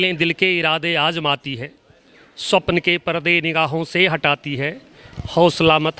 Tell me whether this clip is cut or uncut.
uncut